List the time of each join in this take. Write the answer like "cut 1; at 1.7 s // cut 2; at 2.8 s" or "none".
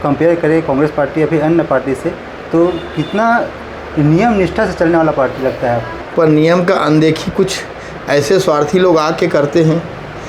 cut 1; at 6.0 s